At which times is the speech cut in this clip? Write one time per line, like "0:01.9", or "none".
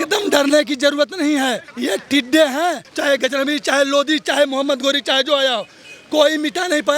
0:01.7
0:02.9